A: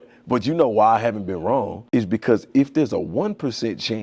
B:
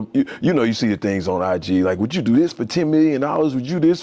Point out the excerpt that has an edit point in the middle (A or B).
A